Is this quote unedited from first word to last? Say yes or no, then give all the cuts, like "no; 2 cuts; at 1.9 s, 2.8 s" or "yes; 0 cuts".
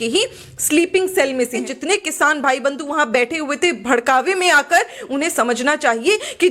no; 1 cut; at 1.6 s